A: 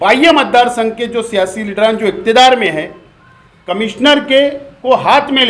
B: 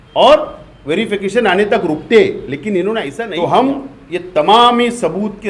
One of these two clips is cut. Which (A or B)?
B